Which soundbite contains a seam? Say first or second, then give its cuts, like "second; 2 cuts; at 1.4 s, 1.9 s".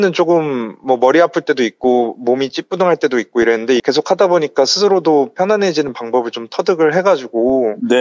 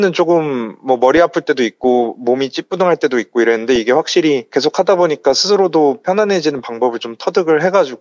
first; 1 cut; at 3.8 s